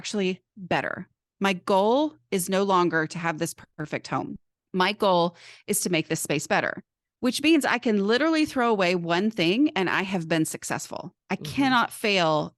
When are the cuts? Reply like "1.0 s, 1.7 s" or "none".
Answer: 3.7 s, 7.1 s